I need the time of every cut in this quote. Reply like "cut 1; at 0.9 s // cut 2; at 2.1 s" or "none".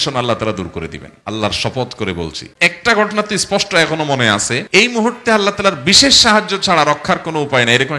cut 1; at 1.1 s // cut 2; at 4.9 s